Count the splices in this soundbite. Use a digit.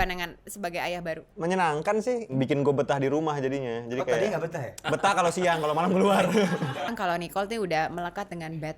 4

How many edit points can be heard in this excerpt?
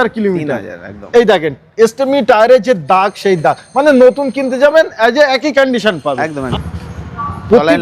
1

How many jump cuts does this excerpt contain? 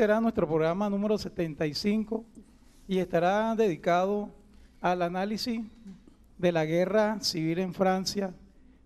0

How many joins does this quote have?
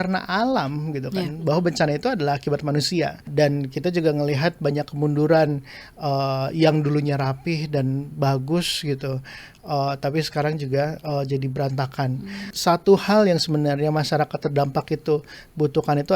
2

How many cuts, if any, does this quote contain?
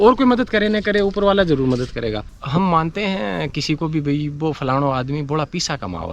1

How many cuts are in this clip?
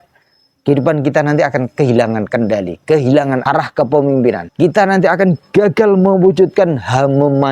2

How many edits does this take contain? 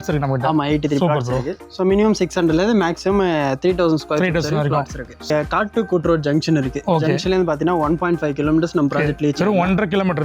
1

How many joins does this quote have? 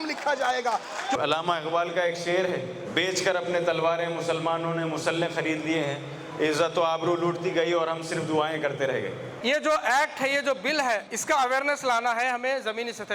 4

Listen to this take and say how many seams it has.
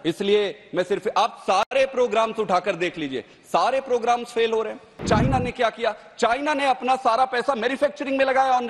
1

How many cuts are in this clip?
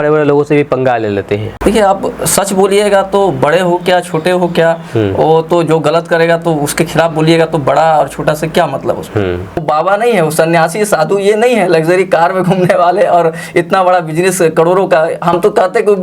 2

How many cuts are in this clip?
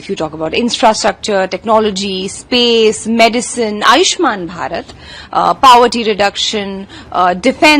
0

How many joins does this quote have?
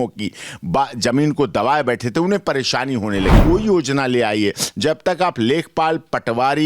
1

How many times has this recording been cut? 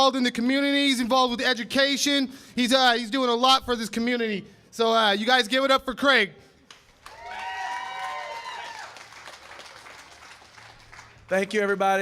1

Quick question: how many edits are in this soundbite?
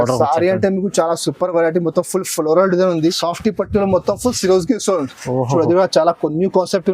1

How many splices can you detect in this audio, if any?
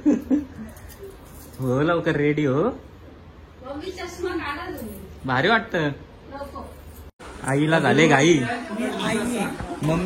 1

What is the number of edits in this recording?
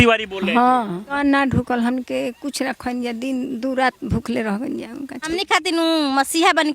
2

